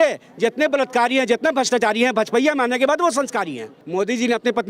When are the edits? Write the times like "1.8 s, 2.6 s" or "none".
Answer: 3.8 s